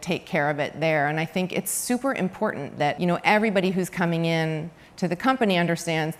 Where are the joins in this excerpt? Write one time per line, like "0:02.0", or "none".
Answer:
0:03.0